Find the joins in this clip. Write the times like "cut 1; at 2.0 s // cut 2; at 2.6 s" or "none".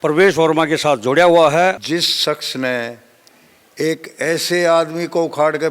cut 1; at 1.8 s